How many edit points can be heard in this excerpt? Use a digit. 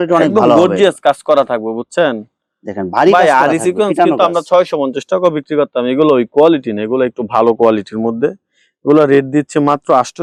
0